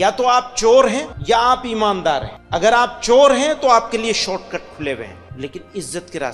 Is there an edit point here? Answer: yes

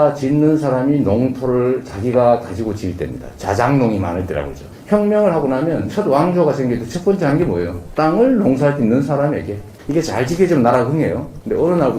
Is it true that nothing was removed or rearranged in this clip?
no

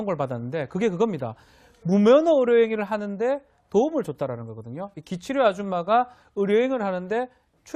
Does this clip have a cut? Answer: no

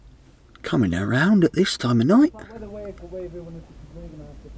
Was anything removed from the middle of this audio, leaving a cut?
no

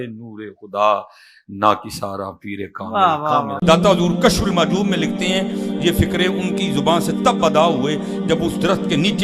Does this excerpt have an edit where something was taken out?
yes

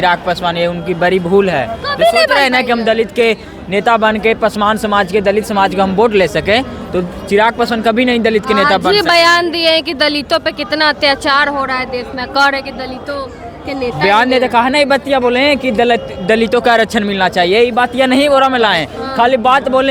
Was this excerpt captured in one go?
yes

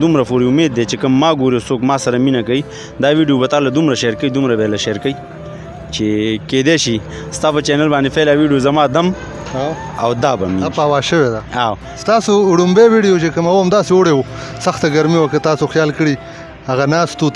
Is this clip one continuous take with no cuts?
yes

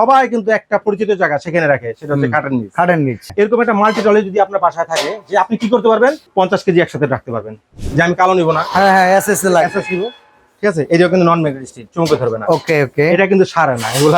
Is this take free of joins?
no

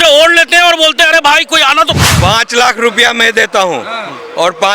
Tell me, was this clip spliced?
yes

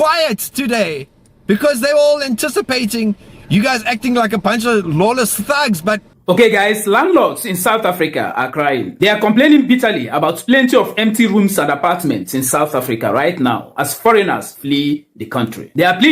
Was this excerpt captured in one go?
no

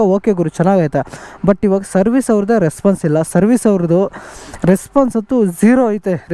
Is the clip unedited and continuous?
yes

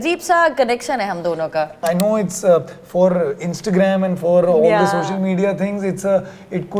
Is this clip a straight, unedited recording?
no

